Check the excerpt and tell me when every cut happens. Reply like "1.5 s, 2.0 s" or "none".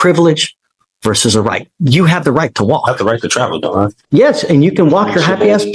4.0 s